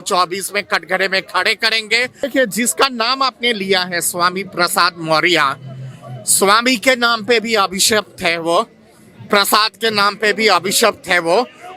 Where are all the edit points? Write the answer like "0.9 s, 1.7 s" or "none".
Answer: 2.2 s